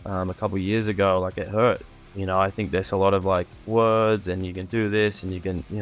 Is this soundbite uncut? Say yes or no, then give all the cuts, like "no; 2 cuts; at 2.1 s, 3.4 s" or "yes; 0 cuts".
no; 2 cuts; at 1.9 s, 3.6 s